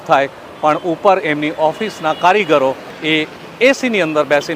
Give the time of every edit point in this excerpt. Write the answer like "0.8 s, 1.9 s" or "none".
2.9 s